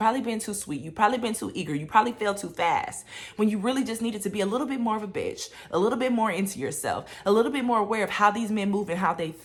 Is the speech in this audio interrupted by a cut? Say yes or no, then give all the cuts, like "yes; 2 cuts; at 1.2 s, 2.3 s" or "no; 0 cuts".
no; 0 cuts